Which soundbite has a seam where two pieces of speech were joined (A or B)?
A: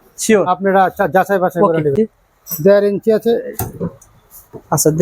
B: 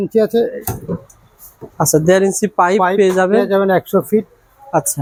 A